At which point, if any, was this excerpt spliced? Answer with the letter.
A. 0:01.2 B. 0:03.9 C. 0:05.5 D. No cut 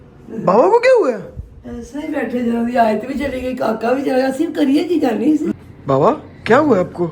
C